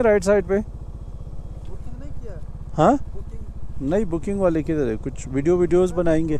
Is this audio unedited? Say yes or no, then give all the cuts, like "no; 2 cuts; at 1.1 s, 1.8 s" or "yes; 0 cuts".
yes; 0 cuts